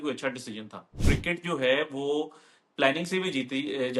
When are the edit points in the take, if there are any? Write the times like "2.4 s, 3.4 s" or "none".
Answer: 1.0 s